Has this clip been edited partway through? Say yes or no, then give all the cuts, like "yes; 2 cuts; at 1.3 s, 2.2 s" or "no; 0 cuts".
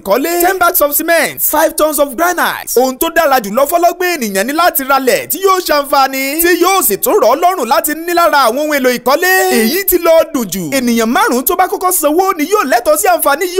no; 0 cuts